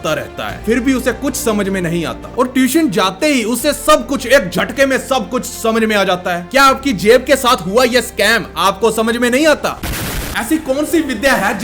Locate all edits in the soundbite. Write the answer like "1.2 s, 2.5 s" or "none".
none